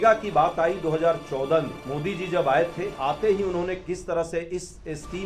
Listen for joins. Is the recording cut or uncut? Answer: cut